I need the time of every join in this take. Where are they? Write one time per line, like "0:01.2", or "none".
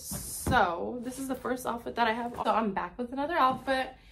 0:02.4